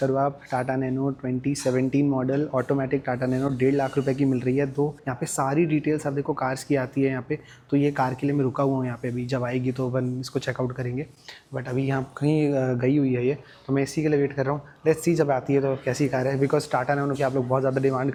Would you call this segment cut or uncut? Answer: uncut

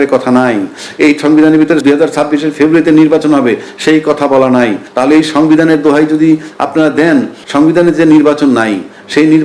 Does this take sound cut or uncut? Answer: cut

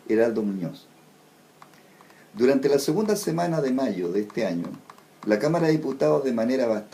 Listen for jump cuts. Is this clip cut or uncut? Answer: uncut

